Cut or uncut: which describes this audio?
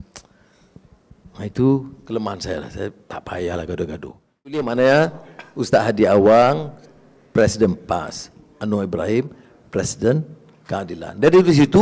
cut